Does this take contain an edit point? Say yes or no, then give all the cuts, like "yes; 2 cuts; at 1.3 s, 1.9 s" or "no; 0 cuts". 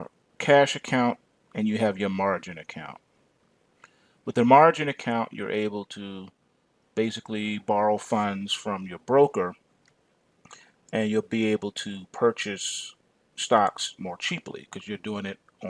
no; 0 cuts